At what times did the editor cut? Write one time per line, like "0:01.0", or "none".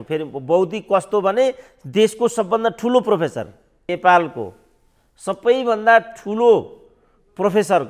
0:03.8